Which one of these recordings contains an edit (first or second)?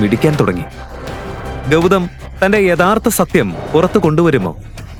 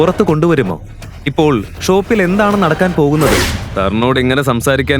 second